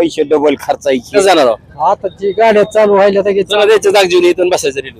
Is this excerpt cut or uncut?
cut